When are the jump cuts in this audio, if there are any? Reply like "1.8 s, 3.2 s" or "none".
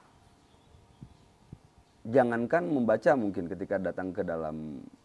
none